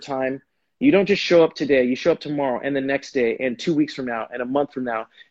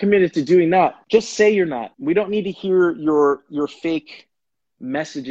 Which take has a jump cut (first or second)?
second